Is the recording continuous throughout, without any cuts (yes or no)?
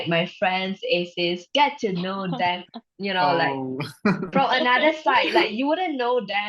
yes